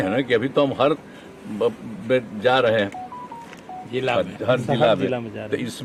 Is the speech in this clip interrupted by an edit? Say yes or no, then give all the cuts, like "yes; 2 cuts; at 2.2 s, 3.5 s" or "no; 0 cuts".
no; 0 cuts